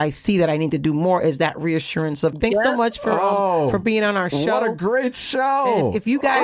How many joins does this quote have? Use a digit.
1